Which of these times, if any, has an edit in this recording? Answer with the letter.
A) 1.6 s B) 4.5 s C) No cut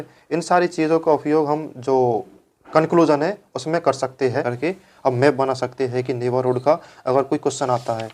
B